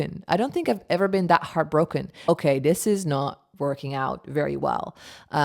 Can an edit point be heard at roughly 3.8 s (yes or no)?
no